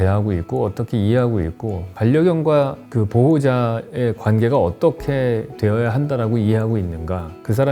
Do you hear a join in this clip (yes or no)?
no